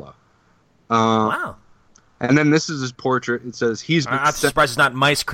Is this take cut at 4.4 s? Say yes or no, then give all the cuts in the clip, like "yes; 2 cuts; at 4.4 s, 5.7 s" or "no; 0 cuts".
yes; 1 cut; at 4.4 s